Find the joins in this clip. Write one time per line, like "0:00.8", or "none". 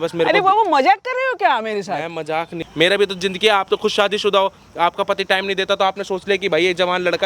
0:02.6